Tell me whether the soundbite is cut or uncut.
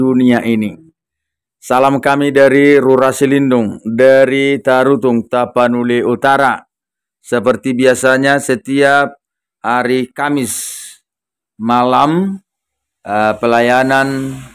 uncut